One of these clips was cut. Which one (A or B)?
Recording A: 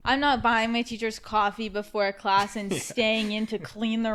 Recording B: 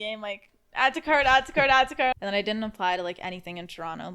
B